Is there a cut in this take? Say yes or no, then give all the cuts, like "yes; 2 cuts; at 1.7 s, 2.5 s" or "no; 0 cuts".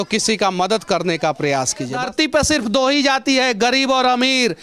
yes; 1 cut; at 2.0 s